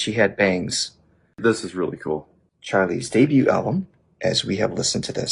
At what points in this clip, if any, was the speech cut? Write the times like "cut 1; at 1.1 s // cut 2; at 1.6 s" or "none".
cut 1; at 1.4 s